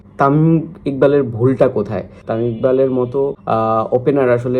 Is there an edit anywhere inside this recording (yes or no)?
yes